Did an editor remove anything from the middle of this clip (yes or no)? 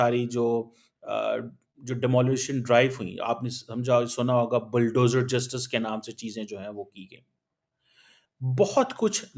no